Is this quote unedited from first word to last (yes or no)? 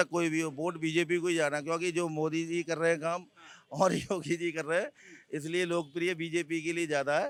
yes